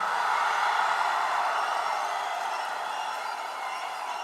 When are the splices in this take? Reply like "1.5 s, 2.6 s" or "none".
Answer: none